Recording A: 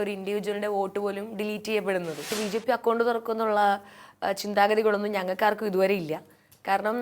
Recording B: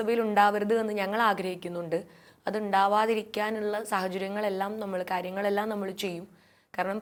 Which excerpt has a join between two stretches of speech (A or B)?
A